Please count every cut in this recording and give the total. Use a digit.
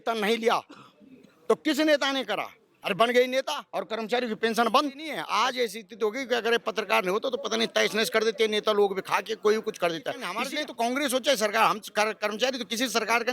2